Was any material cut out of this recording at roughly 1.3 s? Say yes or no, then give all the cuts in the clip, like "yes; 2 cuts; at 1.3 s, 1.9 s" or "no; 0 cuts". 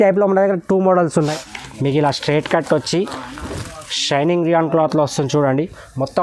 yes; 1 cut; at 1.3 s